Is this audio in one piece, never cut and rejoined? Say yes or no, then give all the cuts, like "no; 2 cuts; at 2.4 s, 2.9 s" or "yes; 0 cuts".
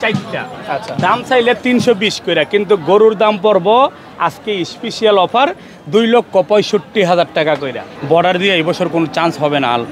no; 1 cut; at 7.9 s